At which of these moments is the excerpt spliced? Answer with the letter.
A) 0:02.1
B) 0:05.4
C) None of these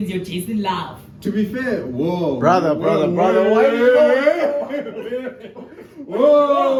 C